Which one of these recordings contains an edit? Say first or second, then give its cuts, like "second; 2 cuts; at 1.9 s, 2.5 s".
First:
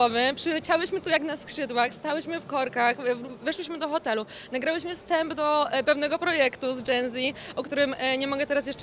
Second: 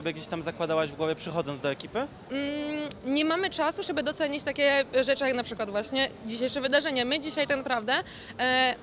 second; 1 cut; at 2.3 s